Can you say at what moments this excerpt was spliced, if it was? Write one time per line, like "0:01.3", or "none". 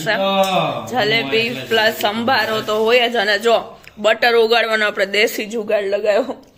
none